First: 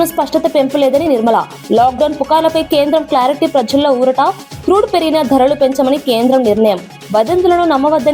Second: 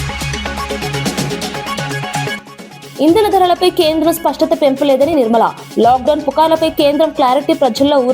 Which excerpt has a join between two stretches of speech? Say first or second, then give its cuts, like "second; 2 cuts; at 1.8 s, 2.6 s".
second; 1 cut; at 2.3 s